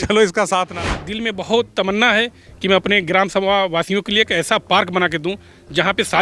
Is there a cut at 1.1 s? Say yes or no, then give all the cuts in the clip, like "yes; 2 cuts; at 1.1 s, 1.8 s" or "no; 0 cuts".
yes; 1 cut; at 1.1 s